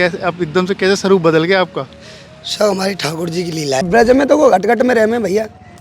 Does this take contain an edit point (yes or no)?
yes